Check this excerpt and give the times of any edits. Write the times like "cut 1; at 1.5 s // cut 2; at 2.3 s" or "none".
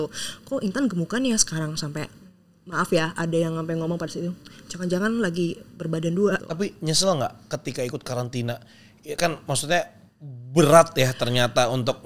cut 1; at 6.5 s

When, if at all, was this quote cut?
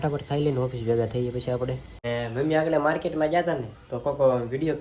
cut 1; at 2.0 s

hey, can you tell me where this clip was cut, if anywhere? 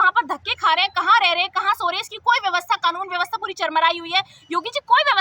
none

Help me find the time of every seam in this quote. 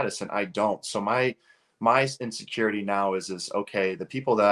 none

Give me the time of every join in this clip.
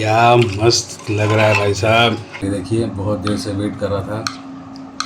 cut 1; at 2.4 s

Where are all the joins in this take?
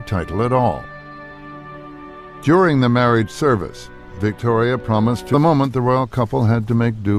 none

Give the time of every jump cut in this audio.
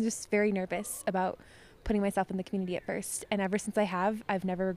none

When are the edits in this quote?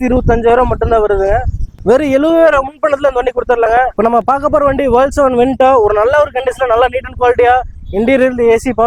cut 1; at 1.7 s // cut 2; at 3.9 s

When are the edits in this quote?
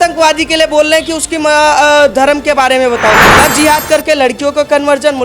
cut 1; at 3.3 s

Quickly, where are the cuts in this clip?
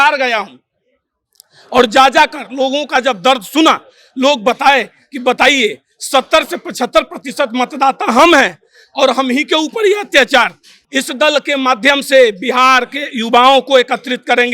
cut 1; at 10.7 s

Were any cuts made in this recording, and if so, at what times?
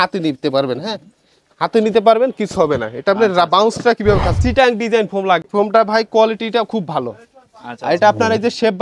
cut 1; at 4.4 s // cut 2; at 5.5 s

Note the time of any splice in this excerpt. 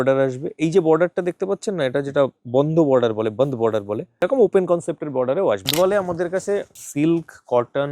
cut 1; at 4.2 s // cut 2; at 5.7 s // cut 3; at 6.8 s

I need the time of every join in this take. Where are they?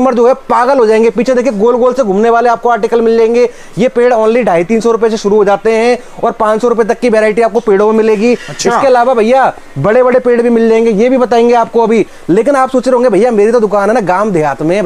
none

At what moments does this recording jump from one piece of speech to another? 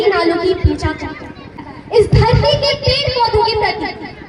cut 1; at 1.6 s

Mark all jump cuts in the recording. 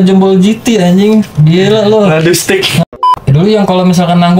cut 1; at 2.8 s

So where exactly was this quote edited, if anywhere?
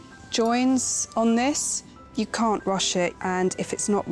cut 1; at 2.0 s // cut 2; at 3.2 s

